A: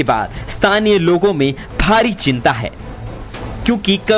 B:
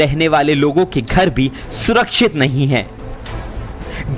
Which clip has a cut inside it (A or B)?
A